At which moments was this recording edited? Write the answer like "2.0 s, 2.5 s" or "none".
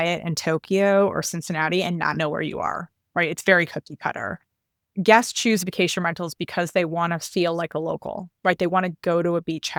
none

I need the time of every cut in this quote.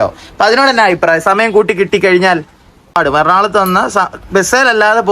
3.0 s

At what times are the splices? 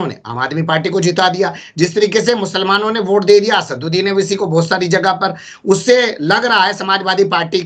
none

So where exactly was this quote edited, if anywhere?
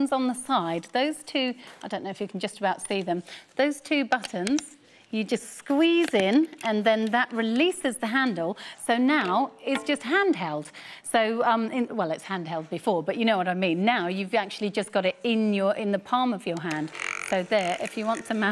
13.6 s

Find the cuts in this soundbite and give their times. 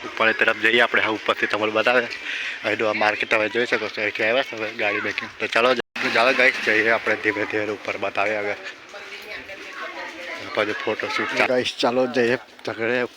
5.8 s, 11.2 s

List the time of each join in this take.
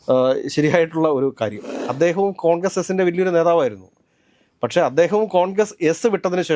1.7 s

